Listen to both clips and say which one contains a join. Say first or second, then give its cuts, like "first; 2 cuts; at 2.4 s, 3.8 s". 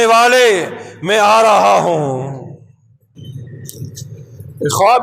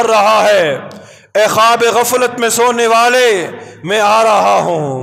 first; 1 cut; at 3.2 s